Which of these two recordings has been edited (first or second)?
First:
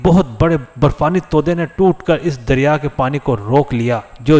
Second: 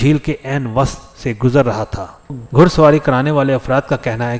second